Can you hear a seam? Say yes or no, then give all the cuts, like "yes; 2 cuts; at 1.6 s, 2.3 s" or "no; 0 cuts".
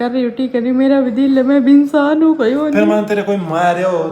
no; 0 cuts